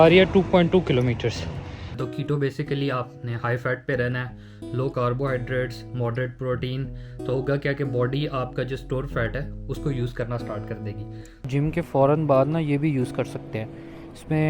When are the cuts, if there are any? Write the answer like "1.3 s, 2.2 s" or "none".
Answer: 2.0 s, 11.4 s